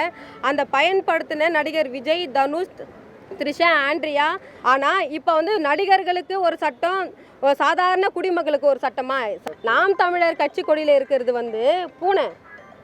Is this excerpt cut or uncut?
cut